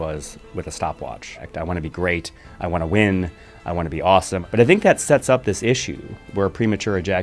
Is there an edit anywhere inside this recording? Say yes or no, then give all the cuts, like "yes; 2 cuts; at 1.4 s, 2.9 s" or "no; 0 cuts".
yes; 2 cuts; at 1.5 s, 4.4 s